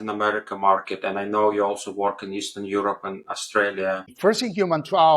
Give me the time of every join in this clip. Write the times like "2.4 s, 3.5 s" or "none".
4.1 s